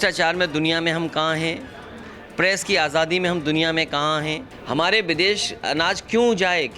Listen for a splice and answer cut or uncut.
cut